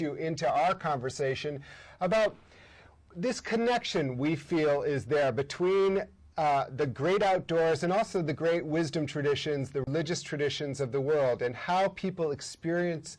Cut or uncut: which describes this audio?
cut